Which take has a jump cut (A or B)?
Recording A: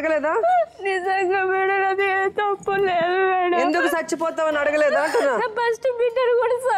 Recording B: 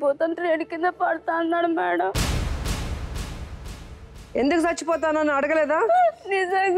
B